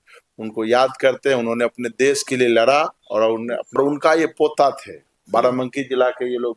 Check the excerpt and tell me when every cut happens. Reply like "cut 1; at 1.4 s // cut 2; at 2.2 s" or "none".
cut 1; at 3.8 s